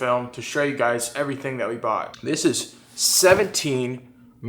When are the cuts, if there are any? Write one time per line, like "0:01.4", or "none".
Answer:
0:02.1